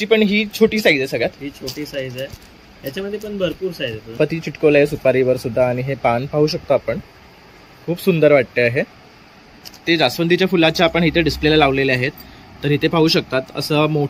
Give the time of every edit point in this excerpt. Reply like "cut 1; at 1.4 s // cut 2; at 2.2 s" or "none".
cut 1; at 4.2 s // cut 2; at 9.8 s